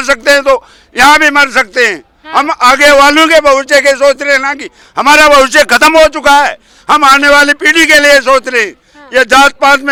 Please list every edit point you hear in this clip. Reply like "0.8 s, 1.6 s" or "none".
none